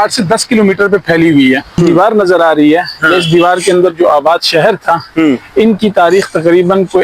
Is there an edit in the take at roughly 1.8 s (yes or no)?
yes